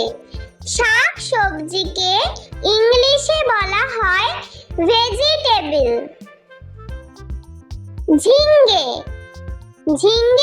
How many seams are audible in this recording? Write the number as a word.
two